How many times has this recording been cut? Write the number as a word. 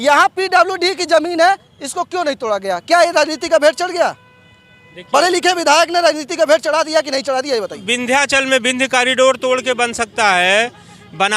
one